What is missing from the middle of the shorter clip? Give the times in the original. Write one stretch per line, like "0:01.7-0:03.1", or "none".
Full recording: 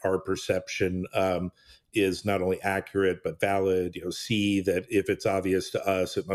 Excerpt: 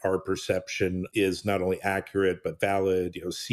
0:01.1-0:01.8